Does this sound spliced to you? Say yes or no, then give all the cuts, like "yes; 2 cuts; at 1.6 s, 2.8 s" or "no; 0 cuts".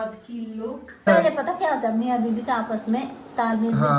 yes; 1 cut; at 1.1 s